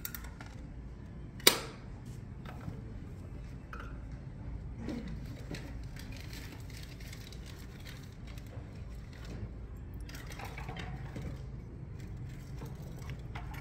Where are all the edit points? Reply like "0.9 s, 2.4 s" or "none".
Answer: none